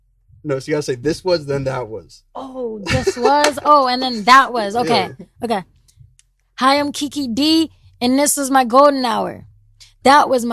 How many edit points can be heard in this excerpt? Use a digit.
0